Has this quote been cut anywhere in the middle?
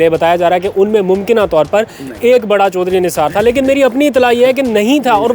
no; 0 cuts

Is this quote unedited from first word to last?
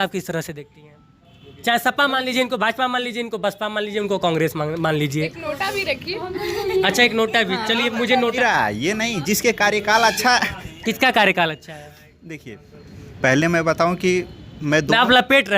no; 2 cuts; at 1.4 s, 8.4 s

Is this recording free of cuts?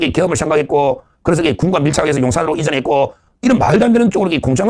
yes; 0 cuts

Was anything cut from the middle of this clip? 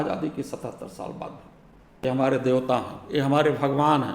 yes; 1 cut; at 2.0 s

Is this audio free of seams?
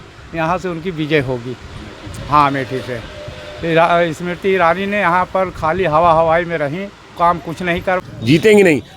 no; 1 cut; at 8.0 s

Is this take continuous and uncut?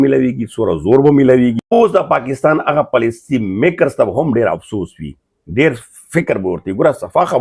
no; 1 cut; at 1.8 s

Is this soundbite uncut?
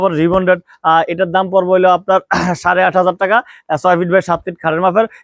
yes; 0 cuts

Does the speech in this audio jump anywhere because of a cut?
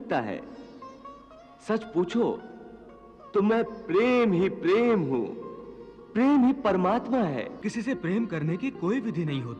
yes; 1 cut; at 7.6 s

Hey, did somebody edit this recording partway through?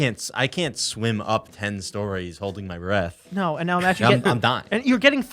no; 0 cuts

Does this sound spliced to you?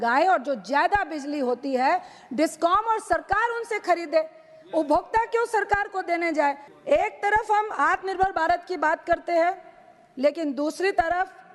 yes; 1 cut; at 6.7 s

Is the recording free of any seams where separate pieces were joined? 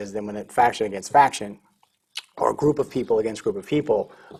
yes; 0 cuts

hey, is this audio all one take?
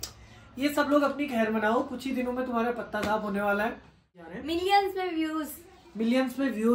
no; 1 cut; at 4.2 s

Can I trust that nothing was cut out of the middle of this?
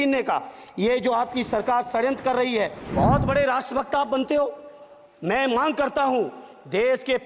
no; 1 cut; at 2.8 s

